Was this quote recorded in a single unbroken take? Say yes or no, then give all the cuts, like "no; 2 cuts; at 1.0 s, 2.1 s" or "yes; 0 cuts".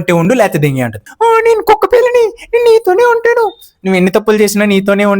no; 1 cut; at 1.0 s